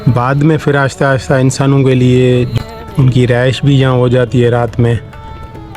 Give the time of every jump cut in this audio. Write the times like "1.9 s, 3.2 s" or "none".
2.5 s